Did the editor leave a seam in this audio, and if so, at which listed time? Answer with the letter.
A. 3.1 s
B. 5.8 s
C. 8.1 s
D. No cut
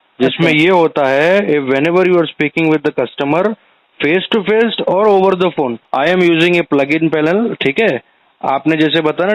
B